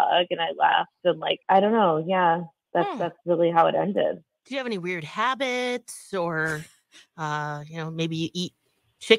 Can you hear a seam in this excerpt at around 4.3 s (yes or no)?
yes